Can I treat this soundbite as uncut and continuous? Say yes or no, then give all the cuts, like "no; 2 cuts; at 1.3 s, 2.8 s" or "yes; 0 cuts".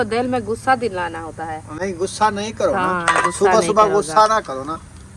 yes; 0 cuts